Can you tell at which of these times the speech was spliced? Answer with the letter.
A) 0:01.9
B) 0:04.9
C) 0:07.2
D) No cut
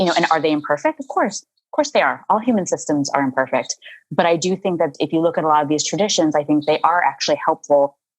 B